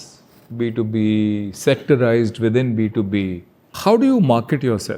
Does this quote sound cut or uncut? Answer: cut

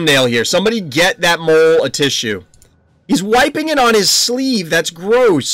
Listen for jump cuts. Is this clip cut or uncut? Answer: uncut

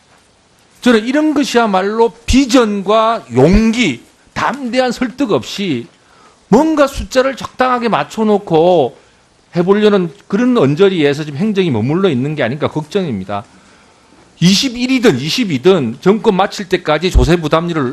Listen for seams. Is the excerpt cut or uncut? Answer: cut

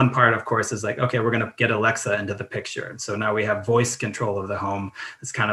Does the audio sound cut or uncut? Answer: uncut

